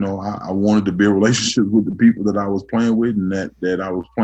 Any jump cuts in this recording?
no; 0 cuts

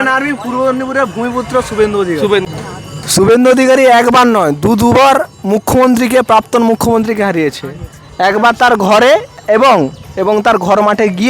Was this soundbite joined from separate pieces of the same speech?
yes; 2 cuts; at 2.5 s, 9.4 s

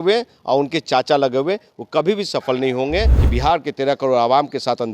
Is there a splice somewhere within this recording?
yes; 1 cut; at 3.2 s

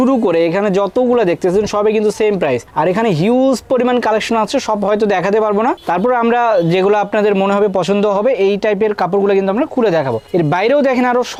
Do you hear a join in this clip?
no; 0 cuts

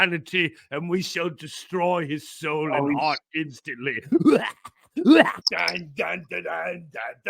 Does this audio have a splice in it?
yes; 1 cut; at 5.4 s

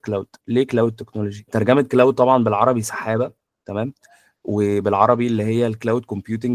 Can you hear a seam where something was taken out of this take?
yes; 1 cut; at 1.4 s

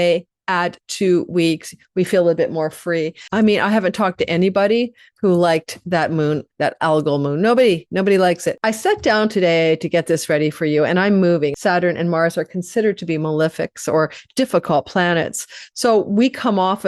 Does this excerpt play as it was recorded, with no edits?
no; 3 cuts; at 3.2 s, 8.5 s, 11.5 s

